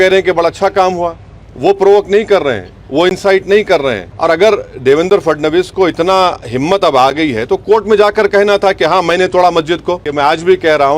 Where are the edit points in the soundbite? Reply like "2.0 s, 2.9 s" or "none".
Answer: 4.1 s, 10.1 s